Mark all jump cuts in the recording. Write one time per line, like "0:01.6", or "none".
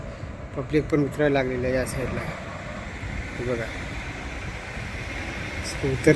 none